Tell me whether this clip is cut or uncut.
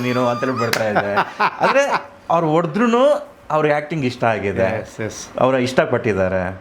uncut